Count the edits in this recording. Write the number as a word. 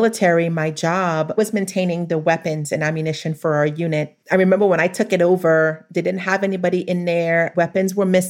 one